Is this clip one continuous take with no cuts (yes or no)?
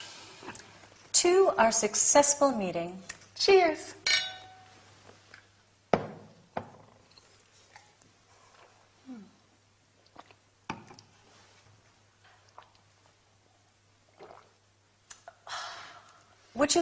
yes